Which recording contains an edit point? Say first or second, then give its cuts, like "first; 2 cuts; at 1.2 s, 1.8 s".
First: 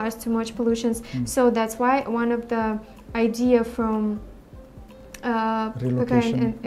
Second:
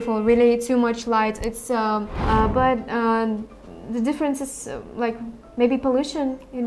second; 1 cut; at 2.1 s